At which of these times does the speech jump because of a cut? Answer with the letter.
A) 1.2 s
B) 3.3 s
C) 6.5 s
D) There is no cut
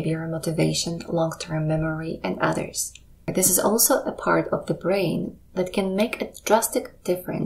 B